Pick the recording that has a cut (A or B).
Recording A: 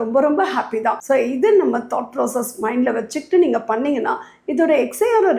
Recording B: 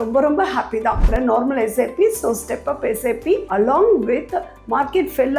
B